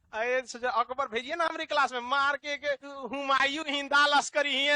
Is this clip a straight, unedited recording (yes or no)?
no